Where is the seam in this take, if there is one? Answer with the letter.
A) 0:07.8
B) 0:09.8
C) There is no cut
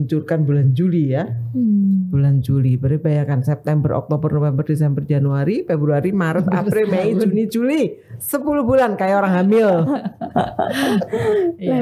C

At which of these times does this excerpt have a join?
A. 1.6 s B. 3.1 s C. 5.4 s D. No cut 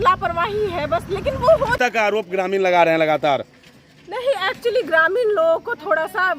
A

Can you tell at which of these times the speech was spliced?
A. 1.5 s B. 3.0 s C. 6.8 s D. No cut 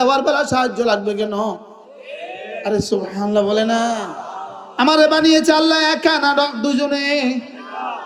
D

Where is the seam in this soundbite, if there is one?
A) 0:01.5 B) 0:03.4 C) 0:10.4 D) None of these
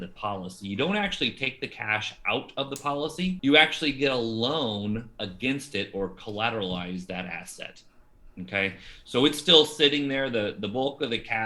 B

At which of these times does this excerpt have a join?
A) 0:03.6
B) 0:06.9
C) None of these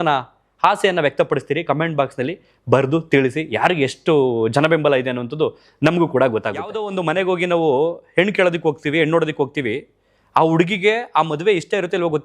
B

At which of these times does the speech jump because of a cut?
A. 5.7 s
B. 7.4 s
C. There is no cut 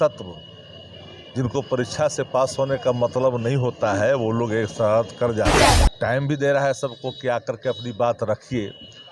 A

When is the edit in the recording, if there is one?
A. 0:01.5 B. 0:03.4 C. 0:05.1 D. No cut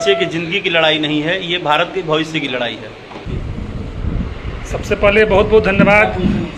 B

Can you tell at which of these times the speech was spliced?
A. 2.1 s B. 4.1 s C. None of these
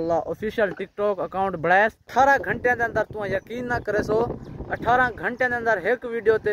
A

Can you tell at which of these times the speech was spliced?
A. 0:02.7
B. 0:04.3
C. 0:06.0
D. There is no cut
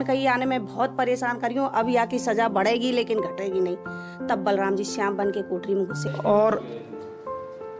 C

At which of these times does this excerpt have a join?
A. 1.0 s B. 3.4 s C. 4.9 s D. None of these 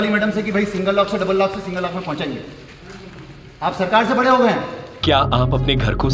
C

